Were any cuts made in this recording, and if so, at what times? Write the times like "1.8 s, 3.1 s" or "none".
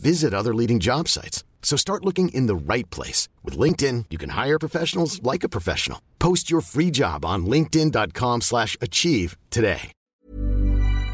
10.0 s